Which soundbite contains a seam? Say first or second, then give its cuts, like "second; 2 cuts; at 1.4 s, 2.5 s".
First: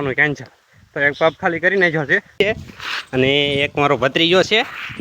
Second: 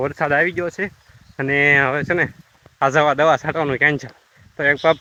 first; 1 cut; at 2.4 s